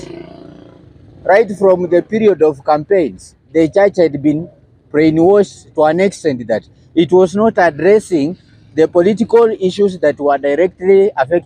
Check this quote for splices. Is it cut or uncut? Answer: uncut